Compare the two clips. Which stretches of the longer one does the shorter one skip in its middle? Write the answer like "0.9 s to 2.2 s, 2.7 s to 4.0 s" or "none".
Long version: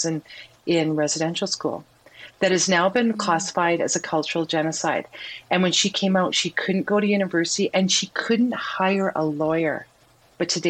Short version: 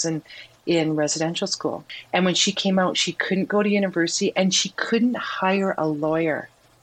1.9 s to 5.3 s

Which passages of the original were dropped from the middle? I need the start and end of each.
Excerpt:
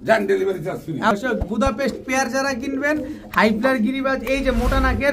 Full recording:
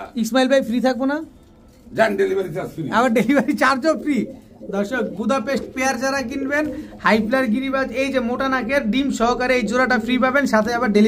3.0 s to 4.8 s

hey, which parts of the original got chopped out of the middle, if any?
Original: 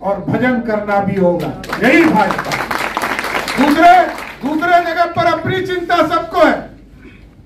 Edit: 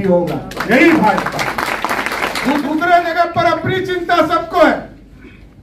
3.7 s to 4.4 s

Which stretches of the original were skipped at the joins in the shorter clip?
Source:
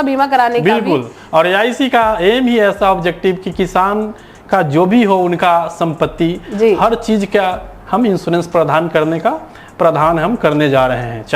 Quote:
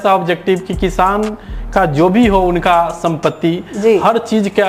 none

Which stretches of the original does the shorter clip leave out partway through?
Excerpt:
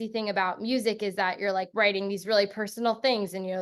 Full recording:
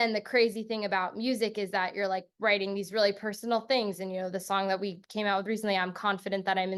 2.2 s to 2.3 s

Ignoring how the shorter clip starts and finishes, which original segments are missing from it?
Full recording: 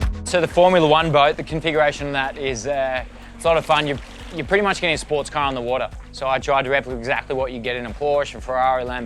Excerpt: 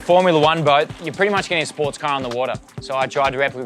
1.5 s to 4.3 s

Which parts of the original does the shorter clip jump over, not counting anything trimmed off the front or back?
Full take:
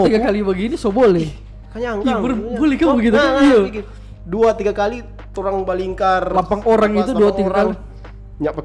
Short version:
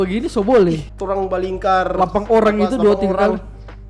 1.4 s to 5.3 s

